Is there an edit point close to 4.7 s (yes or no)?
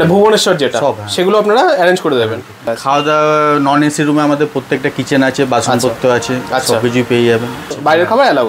no